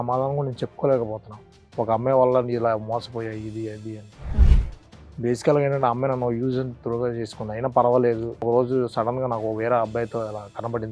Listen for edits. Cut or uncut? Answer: cut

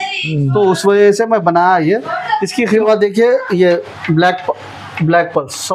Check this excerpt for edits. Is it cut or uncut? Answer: cut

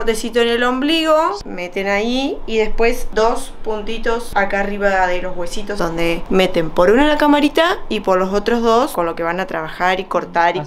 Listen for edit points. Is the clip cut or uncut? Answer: cut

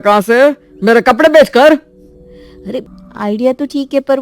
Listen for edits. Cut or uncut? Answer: cut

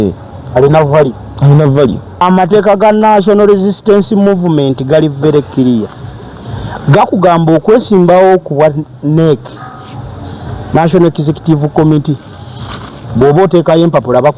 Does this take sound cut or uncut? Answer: cut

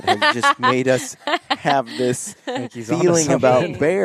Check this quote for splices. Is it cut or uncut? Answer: uncut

